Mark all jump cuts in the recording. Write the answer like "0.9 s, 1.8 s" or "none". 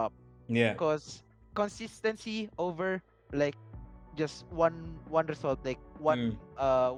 none